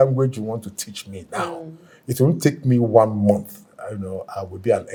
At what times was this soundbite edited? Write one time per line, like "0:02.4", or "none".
none